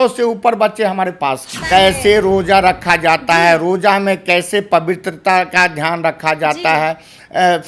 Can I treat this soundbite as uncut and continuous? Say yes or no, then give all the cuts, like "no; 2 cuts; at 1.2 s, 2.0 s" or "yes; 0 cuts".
no; 1 cut; at 1.5 s